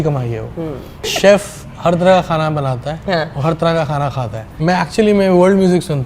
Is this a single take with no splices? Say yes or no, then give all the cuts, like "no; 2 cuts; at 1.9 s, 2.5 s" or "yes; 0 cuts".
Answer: no; 2 cuts; at 1.1 s, 4.6 s